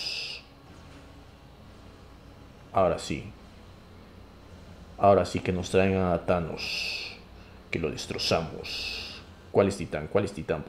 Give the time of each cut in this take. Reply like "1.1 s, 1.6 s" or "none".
none